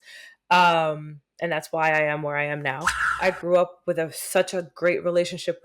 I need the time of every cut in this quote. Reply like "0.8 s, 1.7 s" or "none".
3.2 s